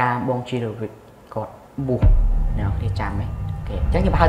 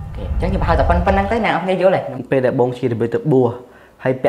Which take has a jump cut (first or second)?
second